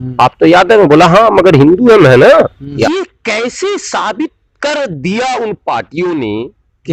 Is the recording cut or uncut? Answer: cut